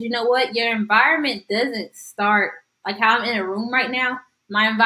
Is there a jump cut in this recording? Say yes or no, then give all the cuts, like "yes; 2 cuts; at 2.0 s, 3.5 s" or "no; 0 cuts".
no; 0 cuts